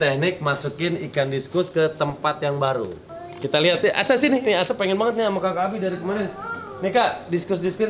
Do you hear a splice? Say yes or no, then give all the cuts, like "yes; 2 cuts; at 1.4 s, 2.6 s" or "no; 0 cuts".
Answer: no; 0 cuts